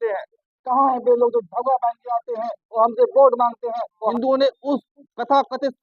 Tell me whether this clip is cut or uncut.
cut